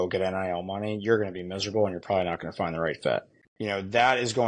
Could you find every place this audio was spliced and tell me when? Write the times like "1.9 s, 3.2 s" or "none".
3.4 s